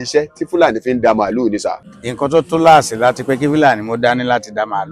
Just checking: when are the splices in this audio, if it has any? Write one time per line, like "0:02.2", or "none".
0:01.9